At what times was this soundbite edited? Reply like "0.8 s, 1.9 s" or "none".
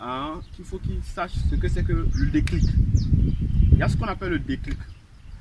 1.4 s